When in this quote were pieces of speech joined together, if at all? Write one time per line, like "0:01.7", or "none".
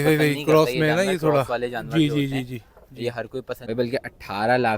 0:03.6